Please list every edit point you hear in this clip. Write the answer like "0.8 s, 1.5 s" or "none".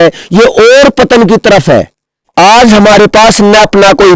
2.2 s